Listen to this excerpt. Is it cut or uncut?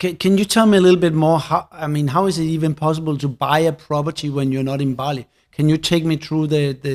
uncut